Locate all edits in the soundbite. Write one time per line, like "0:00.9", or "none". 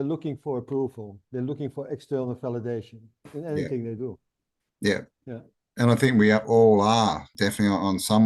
0:07.3